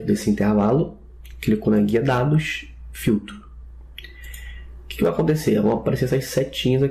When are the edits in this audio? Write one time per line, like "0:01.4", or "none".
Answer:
0:01.6